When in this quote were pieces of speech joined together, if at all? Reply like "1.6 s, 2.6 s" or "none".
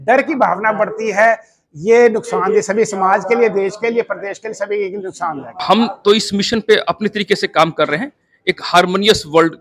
5.5 s